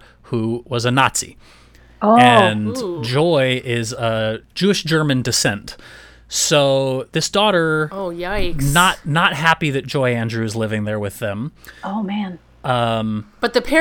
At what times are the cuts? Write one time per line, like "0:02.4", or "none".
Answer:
none